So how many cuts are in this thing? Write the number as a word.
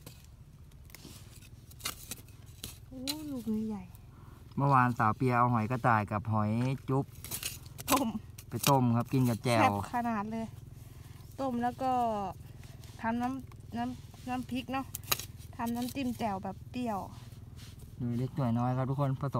zero